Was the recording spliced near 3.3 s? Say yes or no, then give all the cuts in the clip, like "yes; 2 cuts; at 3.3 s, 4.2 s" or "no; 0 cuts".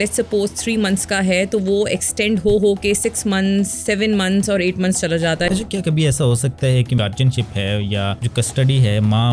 no; 3 cuts; at 5.5 s, 7.0 s, 8.2 s